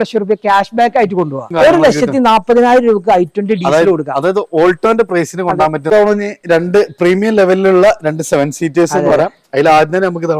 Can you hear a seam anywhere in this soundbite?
yes; 2 cuts; at 1.5 s, 5.8 s

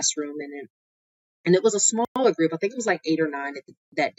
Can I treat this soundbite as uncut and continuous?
yes; 0 cuts

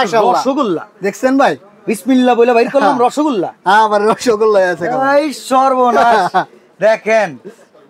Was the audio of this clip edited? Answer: no; 0 cuts

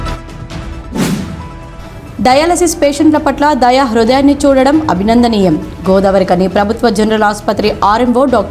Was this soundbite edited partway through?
yes; 1 cut; at 1.3 s

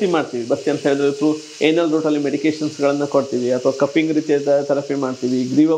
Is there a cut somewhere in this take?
no; 0 cuts

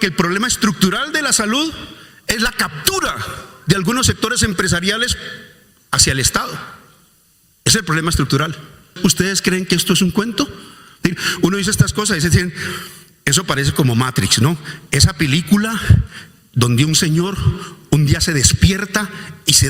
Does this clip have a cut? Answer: yes; 1 cut; at 8.9 s

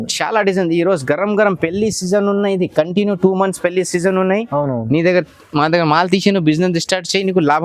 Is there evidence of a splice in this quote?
no; 0 cuts

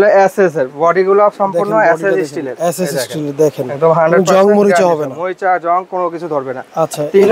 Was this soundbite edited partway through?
no; 0 cuts

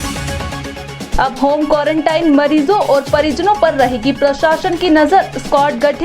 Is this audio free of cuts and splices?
no; 1 cut; at 1.0 s

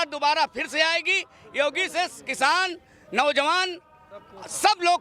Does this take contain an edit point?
no; 0 cuts

